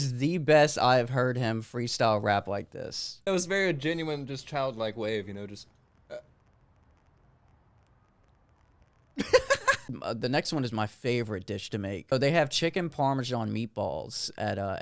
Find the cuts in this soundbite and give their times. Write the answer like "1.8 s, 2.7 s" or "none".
3.1 s, 9.9 s, 12.1 s